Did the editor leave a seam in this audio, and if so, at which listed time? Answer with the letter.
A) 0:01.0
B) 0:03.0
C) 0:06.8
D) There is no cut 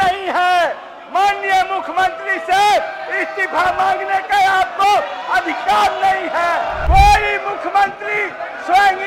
C